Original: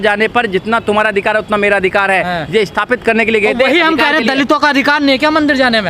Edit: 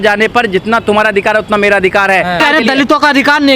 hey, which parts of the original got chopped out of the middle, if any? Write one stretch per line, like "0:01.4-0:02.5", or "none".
0:02.4-0:04.0